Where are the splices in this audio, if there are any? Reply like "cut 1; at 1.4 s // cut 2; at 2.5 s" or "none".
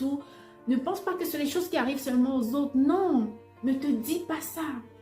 cut 1; at 3.4 s